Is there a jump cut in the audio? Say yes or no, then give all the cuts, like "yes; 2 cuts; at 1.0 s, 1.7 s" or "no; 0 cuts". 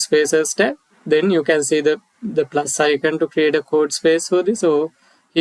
no; 0 cuts